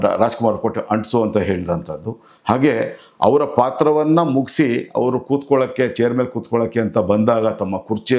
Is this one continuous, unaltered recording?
yes; 0 cuts

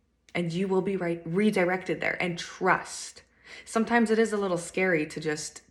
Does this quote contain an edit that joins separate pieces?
no; 0 cuts

